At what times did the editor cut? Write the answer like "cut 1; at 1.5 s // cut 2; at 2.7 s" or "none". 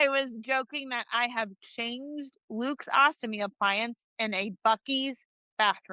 none